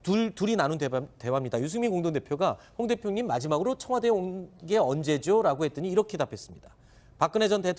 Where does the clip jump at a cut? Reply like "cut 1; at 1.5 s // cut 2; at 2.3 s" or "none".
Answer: none